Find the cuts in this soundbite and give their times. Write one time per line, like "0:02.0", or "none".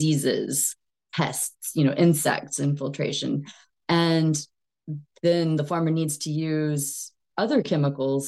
none